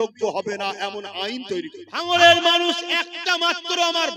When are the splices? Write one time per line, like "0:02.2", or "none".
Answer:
0:02.1